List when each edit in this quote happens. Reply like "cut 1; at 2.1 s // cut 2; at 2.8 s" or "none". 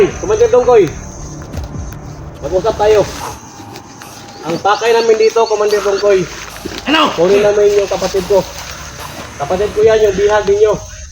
cut 1; at 1.1 s // cut 2; at 2.4 s